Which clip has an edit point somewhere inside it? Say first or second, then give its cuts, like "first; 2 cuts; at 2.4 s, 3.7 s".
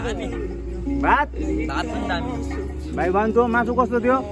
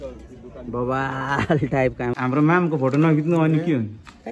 second; 1 cut; at 2.1 s